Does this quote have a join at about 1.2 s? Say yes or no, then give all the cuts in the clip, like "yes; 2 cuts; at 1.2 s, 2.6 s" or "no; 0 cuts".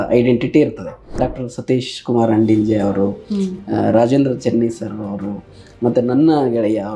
yes; 1 cut; at 1.2 s